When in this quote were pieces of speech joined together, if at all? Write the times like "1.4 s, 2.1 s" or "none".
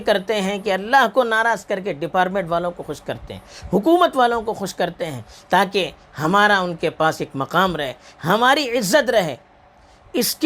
none